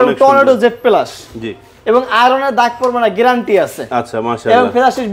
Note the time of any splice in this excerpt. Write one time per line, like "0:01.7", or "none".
none